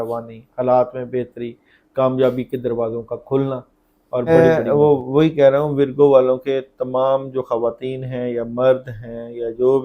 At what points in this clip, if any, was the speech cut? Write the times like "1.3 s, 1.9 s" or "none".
4.3 s